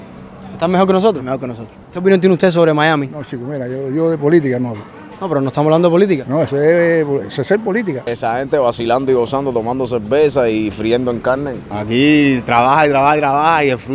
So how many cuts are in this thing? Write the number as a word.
three